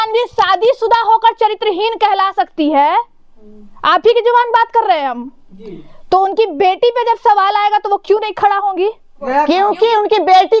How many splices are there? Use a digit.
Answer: 1